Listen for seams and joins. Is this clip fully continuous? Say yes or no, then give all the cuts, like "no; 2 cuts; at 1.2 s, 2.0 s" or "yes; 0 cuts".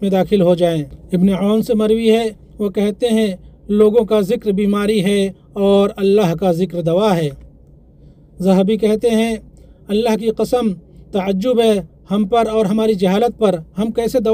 yes; 0 cuts